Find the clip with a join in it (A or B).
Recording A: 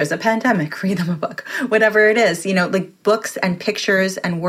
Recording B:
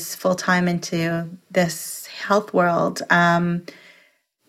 A